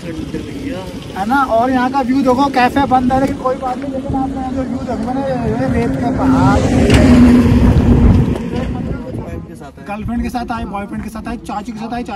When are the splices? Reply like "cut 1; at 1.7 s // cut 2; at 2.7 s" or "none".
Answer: cut 1; at 9.3 s